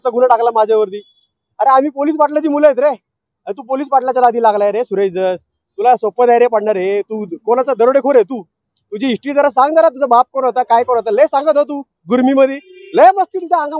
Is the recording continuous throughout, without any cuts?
yes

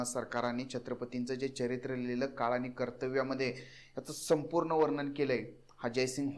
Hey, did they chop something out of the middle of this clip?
no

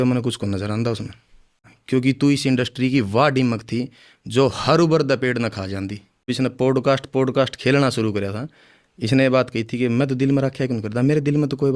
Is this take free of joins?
no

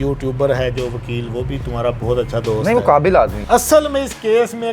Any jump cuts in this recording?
yes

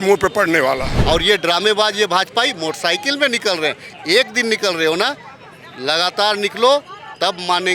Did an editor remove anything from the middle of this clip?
yes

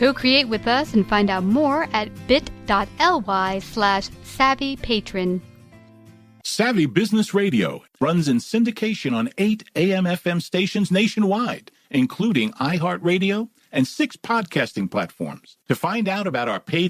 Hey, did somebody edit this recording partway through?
yes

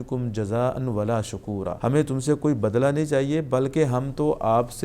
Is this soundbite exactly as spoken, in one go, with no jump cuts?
no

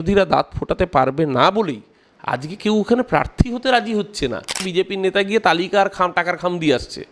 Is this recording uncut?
no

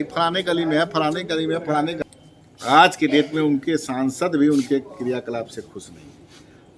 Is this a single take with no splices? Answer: no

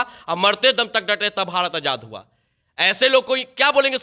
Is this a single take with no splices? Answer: yes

